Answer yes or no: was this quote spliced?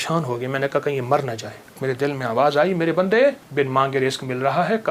yes